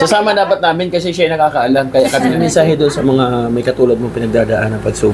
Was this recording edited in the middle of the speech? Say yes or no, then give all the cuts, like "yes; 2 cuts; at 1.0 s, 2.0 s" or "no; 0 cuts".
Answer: yes; 1 cut; at 2.4 s